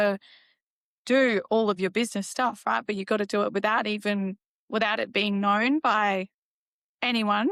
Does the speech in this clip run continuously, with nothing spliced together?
yes; 0 cuts

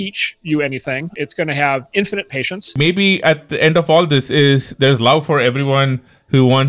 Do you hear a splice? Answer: yes; 2 cuts; at 1.1 s, 2.7 s

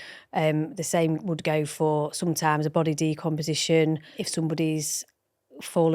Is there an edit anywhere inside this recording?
yes; 1 cut; at 4.2 s

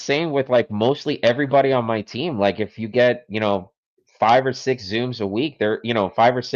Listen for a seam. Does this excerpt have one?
no; 0 cuts

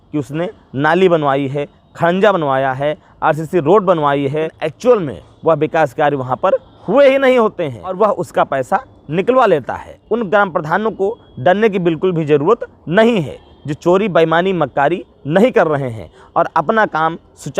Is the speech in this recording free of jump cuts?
no; 3 cuts; at 4.5 s, 8.0 s, 9.9 s

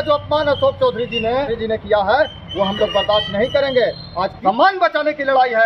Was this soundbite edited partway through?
yes; 2 cuts; at 1.5 s, 4.3 s

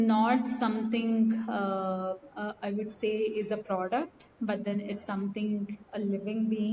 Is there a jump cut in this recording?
no; 0 cuts

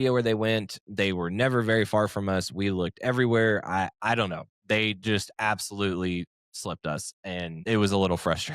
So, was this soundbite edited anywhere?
yes; 1 cut; at 7.6 s

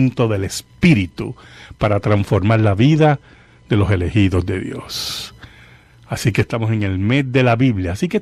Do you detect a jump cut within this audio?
no; 0 cuts

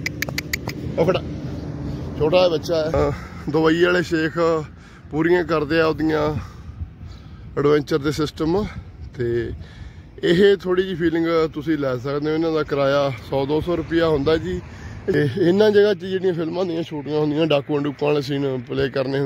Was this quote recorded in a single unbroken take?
no; 2 cuts; at 2.9 s, 15.1 s

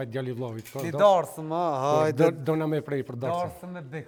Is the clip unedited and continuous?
yes; 0 cuts

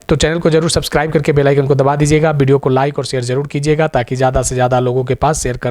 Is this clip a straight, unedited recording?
yes; 0 cuts

